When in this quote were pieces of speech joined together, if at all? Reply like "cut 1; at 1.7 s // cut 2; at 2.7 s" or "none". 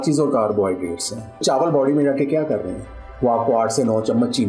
cut 1; at 1.4 s